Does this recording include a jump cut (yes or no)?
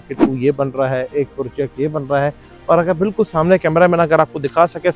no